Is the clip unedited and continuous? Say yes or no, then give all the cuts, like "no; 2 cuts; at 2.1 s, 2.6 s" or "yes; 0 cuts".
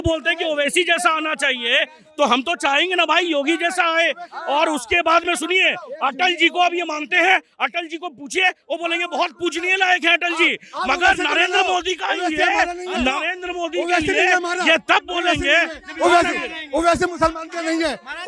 yes; 0 cuts